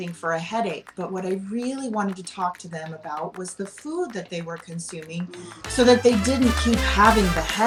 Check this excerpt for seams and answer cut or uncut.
uncut